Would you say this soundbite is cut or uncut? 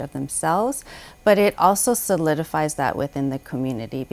uncut